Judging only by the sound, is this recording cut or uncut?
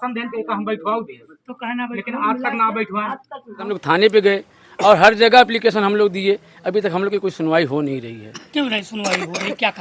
cut